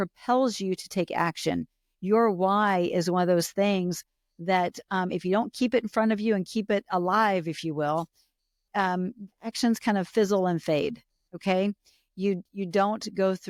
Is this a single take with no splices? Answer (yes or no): yes